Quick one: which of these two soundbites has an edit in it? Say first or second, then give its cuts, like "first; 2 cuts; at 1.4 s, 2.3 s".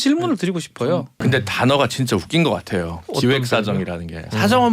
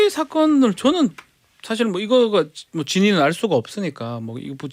first; 1 cut; at 1.1 s